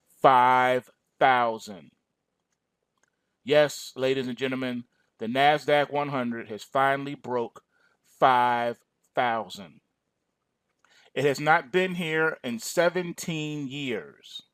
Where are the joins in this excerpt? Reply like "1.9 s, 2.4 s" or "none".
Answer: none

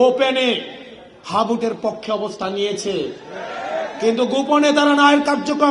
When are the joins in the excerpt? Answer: none

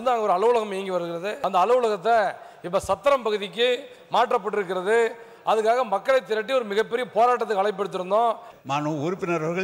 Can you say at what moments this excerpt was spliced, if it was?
1.3 s, 8.5 s

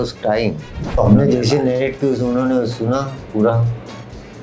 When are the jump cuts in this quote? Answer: 1.0 s

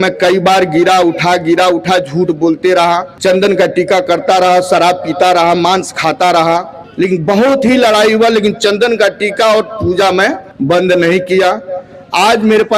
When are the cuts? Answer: 3.1 s, 6.8 s, 10.5 s

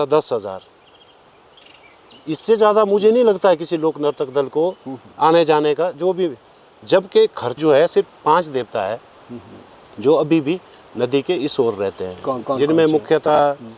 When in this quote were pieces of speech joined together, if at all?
7.5 s

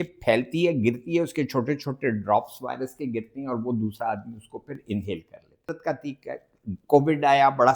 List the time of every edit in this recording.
5.7 s

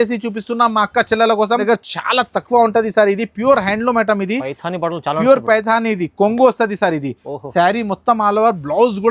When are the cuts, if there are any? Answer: 1.6 s

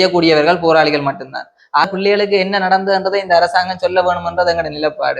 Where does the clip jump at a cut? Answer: 1.8 s

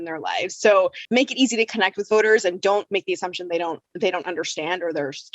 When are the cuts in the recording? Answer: 1.0 s

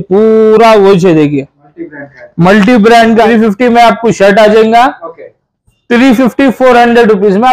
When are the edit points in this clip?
3.3 s

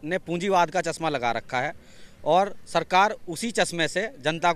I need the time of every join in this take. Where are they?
none

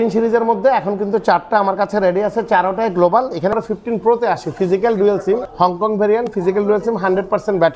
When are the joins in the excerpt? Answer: 3.5 s, 5.5 s

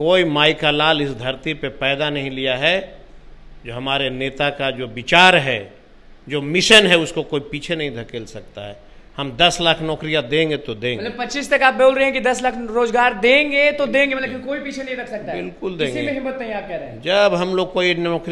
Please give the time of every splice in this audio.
none

